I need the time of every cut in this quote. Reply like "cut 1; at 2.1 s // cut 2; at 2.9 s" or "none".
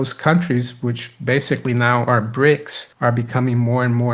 none